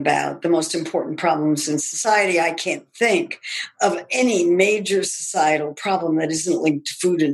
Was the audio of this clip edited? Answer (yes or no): no